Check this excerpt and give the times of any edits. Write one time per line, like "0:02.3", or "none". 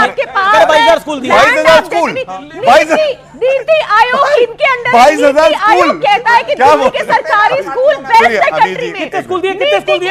none